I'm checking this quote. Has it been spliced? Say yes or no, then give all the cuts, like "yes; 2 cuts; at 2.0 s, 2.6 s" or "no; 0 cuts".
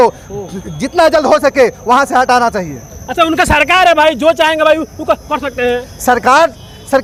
no; 0 cuts